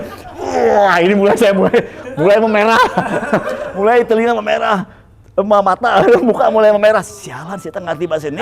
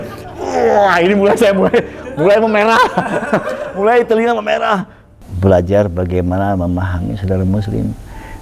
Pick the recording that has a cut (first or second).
second